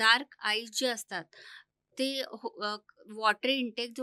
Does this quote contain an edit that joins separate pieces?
no; 0 cuts

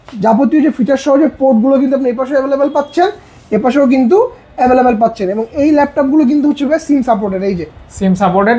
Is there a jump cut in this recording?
no; 0 cuts

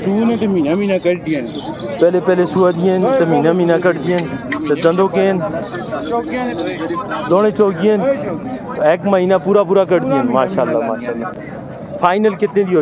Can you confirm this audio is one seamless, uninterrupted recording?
yes; 0 cuts

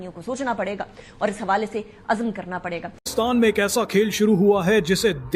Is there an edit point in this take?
no; 0 cuts

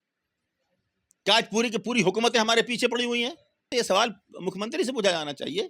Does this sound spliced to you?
yes; 1 cut; at 3.7 s

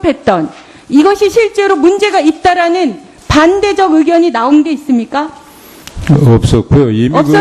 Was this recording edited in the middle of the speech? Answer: yes; 1 cut; at 4.1 s

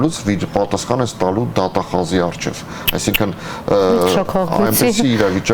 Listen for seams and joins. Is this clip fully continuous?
yes; 0 cuts

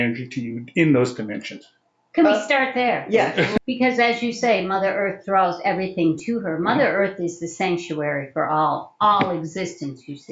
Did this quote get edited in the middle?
yes; 1 cut; at 3.6 s

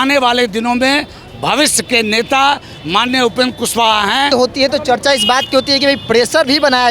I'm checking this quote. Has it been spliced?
yes; 1 cut; at 4.3 s

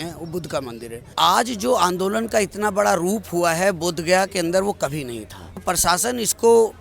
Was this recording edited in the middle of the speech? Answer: yes; 2 cuts; at 1.1 s, 5.6 s

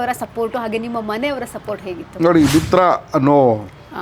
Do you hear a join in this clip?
no; 0 cuts

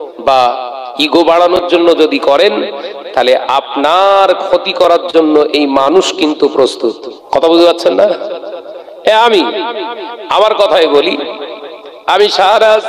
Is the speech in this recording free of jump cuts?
no; 1 cut; at 7.1 s

